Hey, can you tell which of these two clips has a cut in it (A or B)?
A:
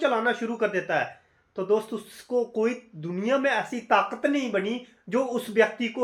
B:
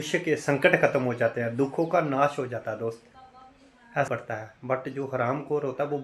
B